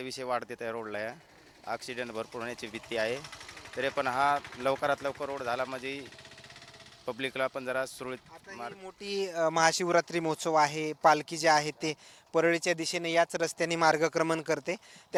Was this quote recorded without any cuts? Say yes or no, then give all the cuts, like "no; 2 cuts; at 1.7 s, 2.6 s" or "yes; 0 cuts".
yes; 0 cuts